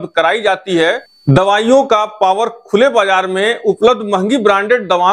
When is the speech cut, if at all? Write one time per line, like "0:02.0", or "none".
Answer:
0:01.1